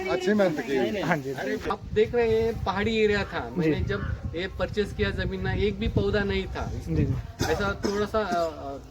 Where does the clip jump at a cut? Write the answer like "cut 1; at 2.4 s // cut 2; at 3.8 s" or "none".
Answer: cut 1; at 1.6 s